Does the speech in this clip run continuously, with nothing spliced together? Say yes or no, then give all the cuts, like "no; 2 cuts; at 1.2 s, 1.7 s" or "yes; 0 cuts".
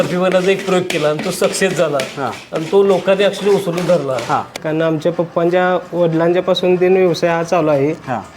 no; 1 cut; at 4.5 s